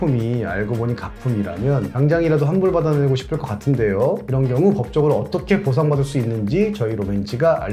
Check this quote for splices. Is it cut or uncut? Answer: uncut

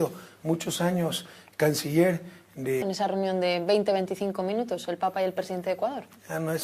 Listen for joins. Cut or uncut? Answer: uncut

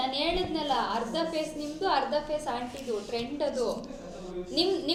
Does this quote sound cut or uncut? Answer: uncut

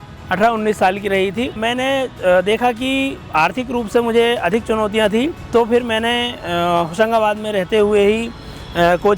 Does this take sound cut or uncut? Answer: cut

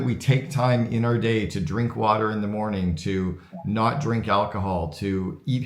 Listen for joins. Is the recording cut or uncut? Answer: uncut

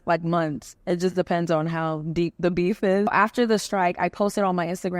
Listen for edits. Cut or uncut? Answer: cut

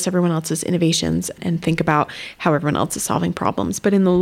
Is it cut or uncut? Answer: cut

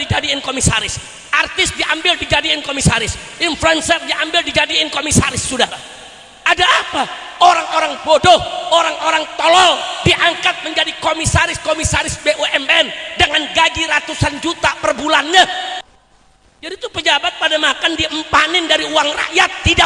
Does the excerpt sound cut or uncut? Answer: cut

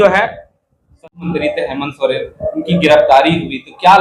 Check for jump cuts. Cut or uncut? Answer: cut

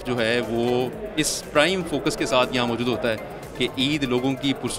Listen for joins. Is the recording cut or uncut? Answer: uncut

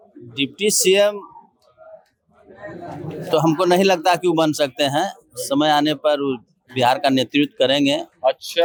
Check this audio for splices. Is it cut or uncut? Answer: uncut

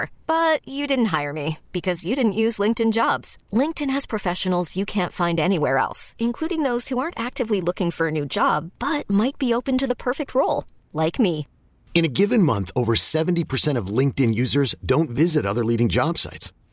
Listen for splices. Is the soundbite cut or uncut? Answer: uncut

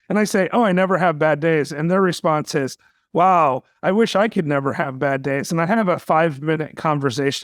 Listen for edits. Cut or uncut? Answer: uncut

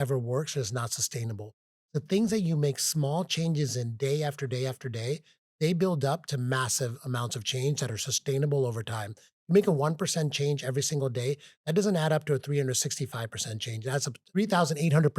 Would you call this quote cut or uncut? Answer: cut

